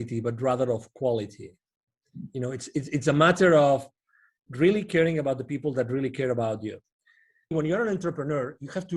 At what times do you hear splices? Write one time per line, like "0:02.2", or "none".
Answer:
0:07.5